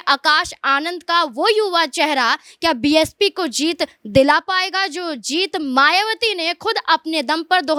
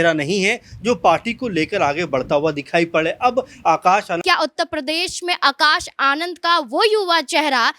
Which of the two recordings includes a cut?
second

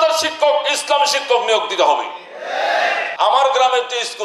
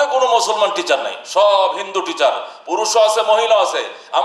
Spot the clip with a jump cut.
first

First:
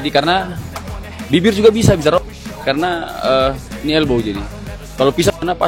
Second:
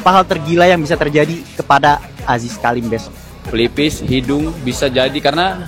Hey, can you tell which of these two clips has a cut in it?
second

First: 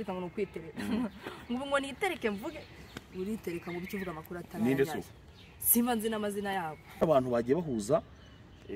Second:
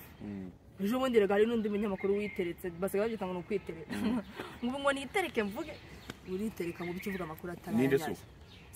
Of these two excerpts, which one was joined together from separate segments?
first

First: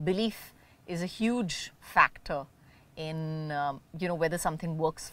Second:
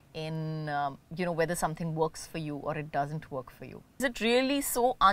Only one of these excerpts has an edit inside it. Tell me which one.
second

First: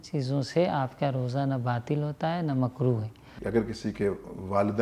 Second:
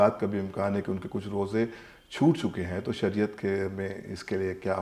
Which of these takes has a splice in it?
first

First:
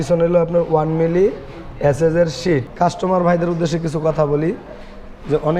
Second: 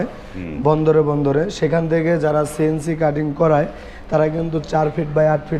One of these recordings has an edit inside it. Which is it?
first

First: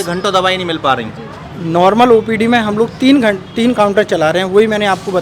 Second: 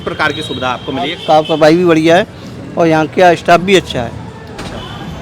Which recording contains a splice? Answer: second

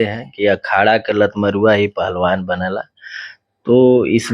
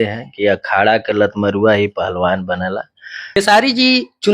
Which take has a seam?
second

